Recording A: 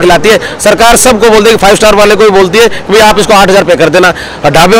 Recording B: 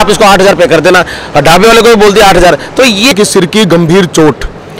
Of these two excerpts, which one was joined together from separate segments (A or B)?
B